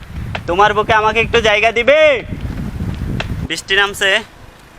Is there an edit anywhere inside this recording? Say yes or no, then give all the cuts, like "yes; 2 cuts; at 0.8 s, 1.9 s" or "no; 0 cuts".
yes; 1 cut; at 3.5 s